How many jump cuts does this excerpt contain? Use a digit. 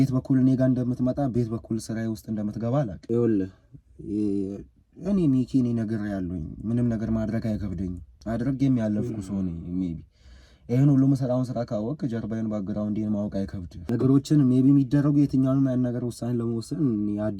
3